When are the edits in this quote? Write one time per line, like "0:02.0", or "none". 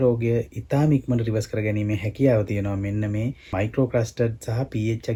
none